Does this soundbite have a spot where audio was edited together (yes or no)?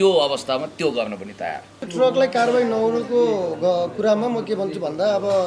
yes